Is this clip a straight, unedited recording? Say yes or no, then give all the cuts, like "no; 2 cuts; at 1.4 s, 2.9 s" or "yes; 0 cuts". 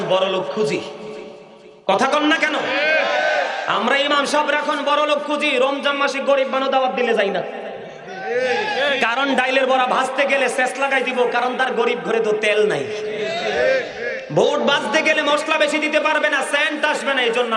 yes; 0 cuts